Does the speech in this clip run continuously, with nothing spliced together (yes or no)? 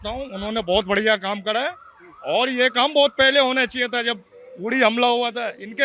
yes